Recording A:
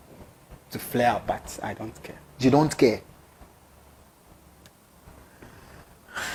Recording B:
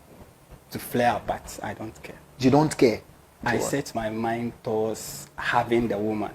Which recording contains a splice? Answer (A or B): B